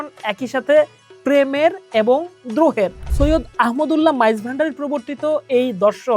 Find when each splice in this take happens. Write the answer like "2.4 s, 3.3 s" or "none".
3.0 s